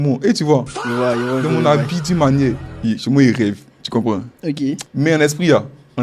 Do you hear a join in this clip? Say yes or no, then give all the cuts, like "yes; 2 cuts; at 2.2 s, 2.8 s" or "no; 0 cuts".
yes; 2 cuts; at 2.7 s, 4.8 s